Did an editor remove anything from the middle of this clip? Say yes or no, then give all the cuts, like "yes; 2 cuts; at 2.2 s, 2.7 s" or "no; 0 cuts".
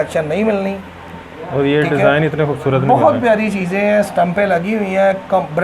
no; 0 cuts